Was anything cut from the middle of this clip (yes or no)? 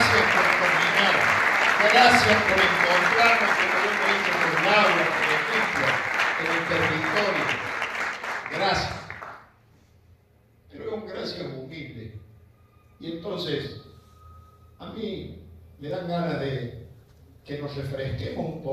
no